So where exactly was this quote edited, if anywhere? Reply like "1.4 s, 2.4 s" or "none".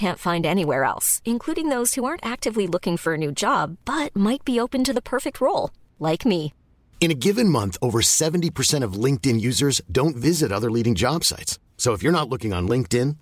none